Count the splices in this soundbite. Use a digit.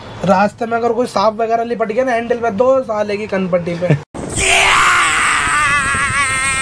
0